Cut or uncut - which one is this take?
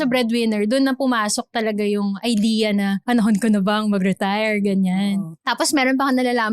cut